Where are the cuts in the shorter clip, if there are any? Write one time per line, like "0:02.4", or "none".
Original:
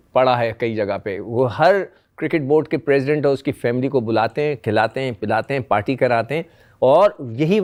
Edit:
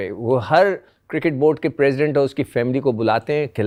none